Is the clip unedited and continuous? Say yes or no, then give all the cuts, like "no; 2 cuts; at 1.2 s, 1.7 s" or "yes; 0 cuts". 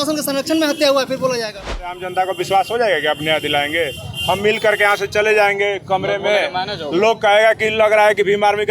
no; 1 cut; at 1.7 s